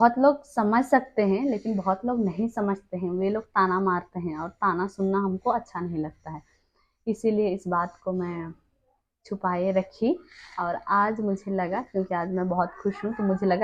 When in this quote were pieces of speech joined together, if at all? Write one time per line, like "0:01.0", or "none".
none